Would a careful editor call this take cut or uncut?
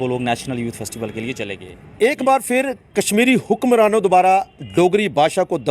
cut